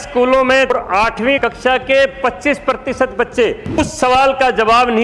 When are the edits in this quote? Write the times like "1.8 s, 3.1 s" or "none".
1.2 s, 3.8 s